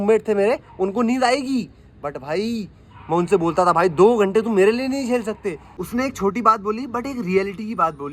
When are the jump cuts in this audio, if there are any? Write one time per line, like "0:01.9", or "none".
0:05.7